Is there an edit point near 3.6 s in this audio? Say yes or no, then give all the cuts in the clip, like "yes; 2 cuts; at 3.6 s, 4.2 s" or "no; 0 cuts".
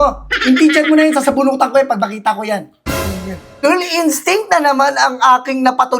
yes; 1 cut; at 3.6 s